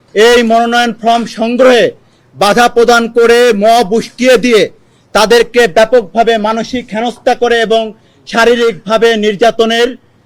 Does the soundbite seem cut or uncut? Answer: uncut